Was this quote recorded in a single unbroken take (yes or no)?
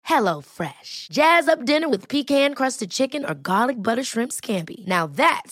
yes